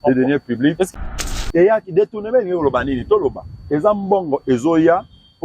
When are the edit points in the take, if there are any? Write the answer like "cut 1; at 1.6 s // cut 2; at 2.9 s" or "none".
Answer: cut 1; at 0.9 s